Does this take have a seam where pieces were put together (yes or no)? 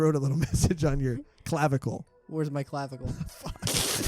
yes